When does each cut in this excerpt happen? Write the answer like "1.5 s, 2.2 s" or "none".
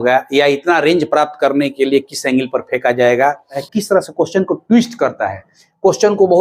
3.7 s